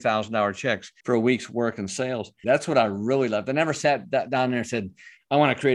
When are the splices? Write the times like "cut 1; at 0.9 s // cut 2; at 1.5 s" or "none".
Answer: cut 1; at 0.9 s // cut 2; at 2.4 s